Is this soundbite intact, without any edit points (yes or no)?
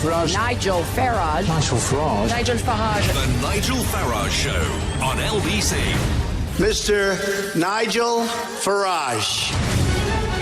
no